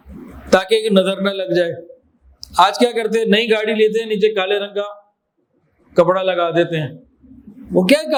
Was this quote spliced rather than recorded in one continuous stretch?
no; 0 cuts

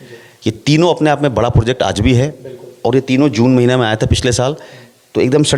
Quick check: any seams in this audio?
no; 0 cuts

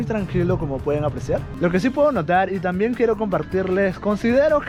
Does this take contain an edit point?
no; 0 cuts

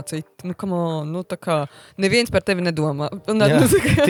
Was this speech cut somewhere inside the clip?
no; 0 cuts

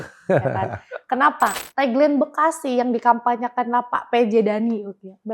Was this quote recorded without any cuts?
no; 1 cut; at 1.6 s

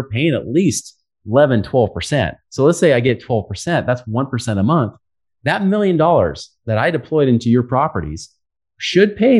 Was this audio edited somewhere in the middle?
no; 0 cuts

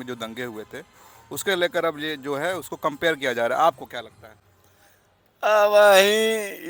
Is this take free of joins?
yes; 0 cuts

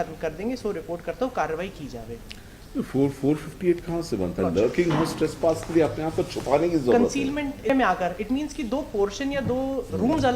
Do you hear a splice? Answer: yes; 1 cut; at 7.7 s

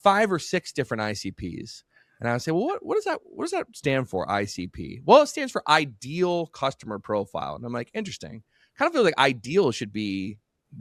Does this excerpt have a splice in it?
no; 0 cuts

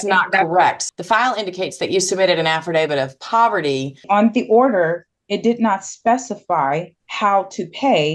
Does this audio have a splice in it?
yes; 3 cuts; at 0.8 s, 4.0 s, 7.0 s

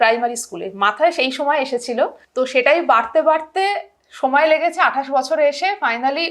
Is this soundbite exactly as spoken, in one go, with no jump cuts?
no; 1 cut; at 2.2 s

